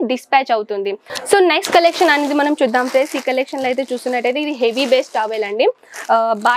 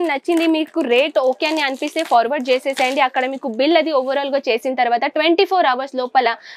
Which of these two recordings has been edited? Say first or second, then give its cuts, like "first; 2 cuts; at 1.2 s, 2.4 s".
first; 1 cut; at 1.0 s